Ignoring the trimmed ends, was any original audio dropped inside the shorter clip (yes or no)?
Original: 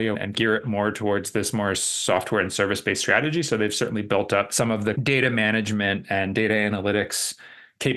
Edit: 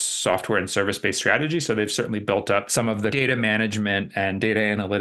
yes